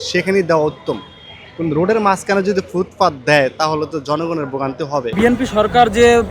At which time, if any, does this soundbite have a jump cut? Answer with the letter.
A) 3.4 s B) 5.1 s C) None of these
B